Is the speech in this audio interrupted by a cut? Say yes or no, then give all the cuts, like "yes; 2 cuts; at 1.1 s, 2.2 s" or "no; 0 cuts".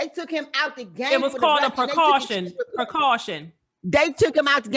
no; 0 cuts